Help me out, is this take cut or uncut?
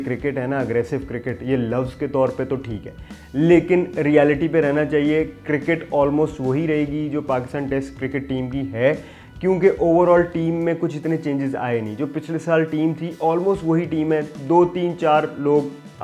uncut